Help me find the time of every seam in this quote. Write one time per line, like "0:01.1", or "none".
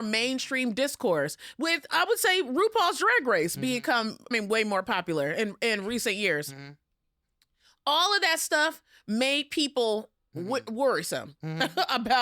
none

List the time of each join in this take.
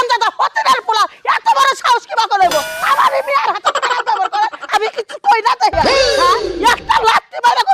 none

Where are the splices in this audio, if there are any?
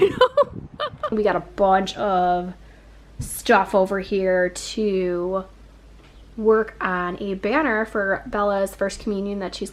0:01.1

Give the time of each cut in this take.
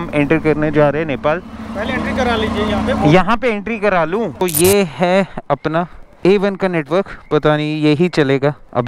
0:01.6
0:04.4
0:06.0

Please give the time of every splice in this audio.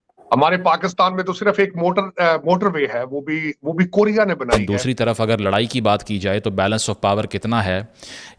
0:04.6

